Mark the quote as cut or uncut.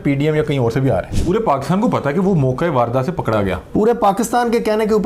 cut